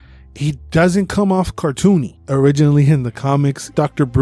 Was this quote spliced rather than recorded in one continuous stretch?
yes; 1 cut; at 2.1 s

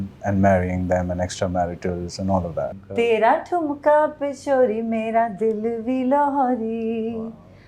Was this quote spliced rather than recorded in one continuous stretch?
yes; 1 cut; at 2.8 s

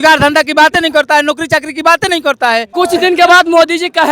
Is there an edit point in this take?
yes; 1 cut; at 2.7 s

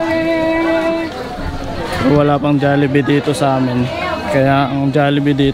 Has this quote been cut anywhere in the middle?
no; 0 cuts

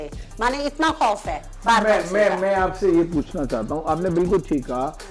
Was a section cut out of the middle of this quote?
no; 0 cuts

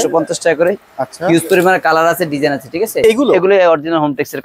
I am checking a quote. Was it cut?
yes; 1 cut; at 3.0 s

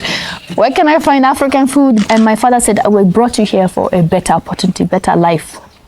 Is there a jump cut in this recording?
yes; 1 cut; at 2.0 s

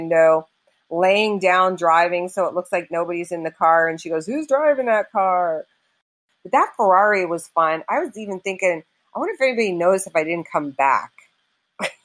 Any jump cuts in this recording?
yes; 1 cut; at 6.1 s

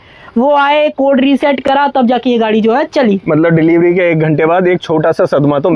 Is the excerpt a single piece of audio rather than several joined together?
yes; 0 cuts

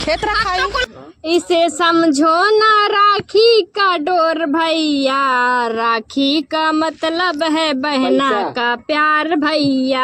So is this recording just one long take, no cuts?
no; 1 cut; at 0.9 s

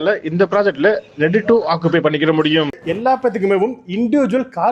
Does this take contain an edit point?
yes; 1 cut; at 2.7 s

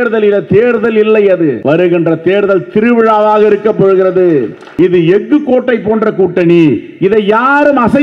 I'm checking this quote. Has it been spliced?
yes; 2 cuts; at 1.6 s, 4.6 s

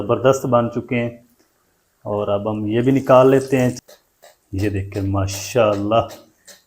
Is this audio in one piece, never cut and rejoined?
no; 1 cut; at 3.8 s

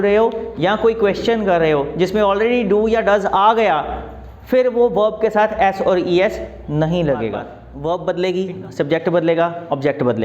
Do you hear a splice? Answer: yes; 1 cut; at 7.6 s

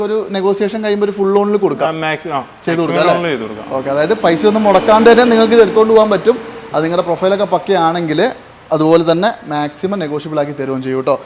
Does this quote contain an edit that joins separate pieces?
no; 0 cuts

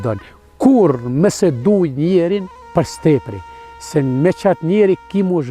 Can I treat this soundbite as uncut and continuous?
no; 1 cut; at 2.6 s

